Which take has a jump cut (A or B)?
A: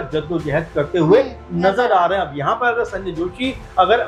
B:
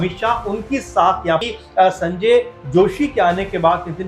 B